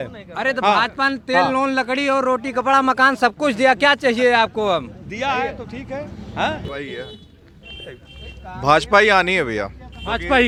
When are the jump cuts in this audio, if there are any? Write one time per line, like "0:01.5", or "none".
none